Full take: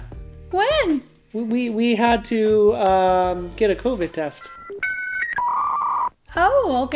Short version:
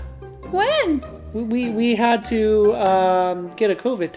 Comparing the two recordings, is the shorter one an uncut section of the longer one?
yes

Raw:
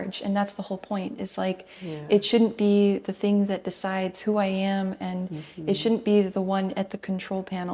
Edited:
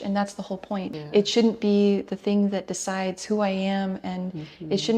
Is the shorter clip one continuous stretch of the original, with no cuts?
no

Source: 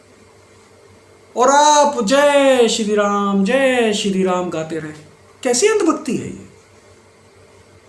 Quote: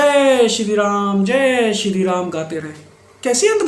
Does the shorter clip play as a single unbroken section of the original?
yes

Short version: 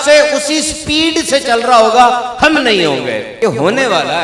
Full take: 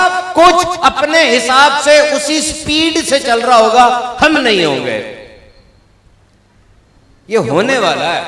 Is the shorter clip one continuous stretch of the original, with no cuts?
no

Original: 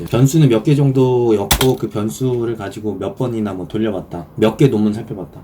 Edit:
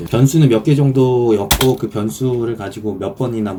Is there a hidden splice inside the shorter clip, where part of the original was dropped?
no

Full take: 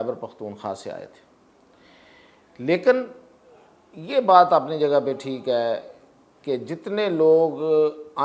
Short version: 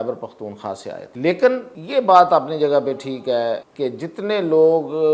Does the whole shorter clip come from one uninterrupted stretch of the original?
no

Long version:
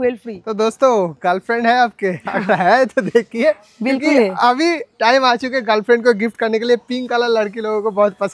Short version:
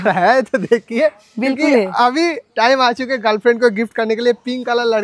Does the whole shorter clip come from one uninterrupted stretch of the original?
yes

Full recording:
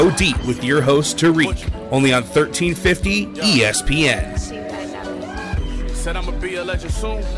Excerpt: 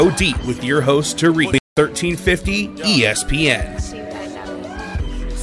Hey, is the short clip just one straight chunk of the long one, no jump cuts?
no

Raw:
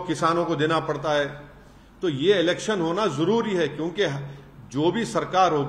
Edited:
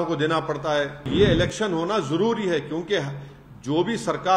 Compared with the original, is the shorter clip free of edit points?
no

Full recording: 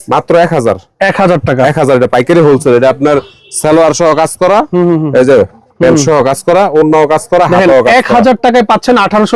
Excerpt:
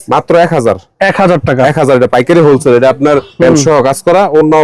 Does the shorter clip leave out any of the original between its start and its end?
yes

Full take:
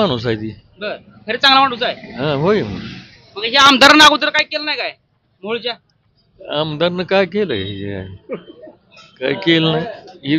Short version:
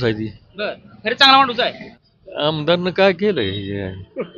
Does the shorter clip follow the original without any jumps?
no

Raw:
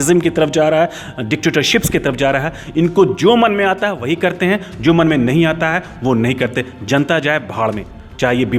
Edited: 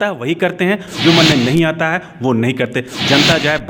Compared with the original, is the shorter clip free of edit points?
yes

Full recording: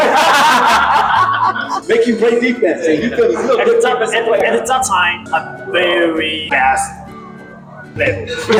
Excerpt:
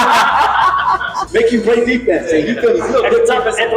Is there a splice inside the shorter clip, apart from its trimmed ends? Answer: no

